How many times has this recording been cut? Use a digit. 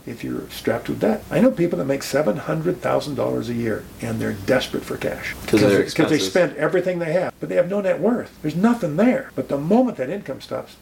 5